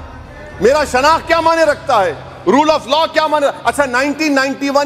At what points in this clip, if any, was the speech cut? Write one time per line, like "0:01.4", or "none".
none